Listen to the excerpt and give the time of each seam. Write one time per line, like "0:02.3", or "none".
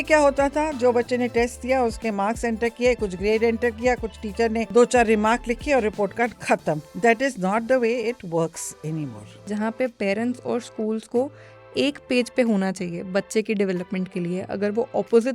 0:04.6
0:06.9
0:09.5